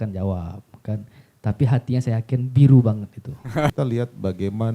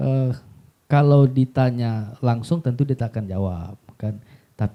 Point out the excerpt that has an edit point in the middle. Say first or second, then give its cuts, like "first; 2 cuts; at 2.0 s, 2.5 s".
first; 1 cut; at 3.7 s